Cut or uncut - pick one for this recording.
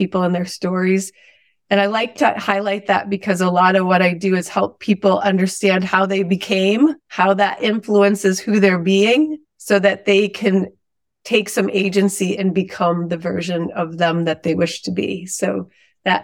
uncut